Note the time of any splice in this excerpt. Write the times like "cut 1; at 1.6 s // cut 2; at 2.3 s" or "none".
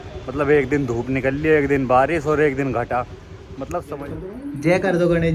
cut 1; at 3.9 s